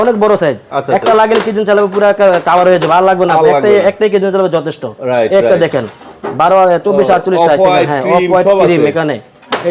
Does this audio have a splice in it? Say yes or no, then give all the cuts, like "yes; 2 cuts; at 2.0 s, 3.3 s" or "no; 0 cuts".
no; 0 cuts